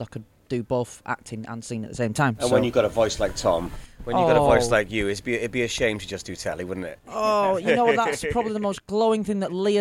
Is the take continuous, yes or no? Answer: yes